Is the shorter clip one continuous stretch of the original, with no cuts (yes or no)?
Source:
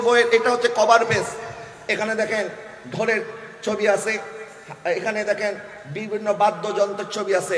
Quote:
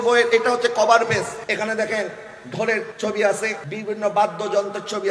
no